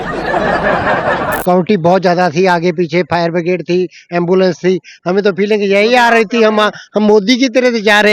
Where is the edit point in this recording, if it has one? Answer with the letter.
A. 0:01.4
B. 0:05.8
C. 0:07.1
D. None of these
A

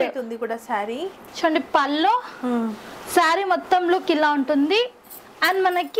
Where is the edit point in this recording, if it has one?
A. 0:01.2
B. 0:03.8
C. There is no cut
A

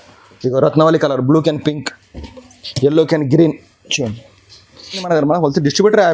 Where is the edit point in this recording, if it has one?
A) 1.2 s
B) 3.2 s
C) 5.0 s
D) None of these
C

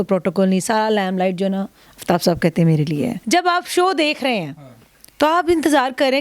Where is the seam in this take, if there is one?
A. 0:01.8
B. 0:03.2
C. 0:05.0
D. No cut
B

